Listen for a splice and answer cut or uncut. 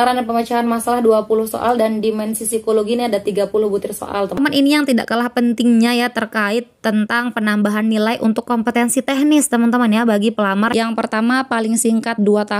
cut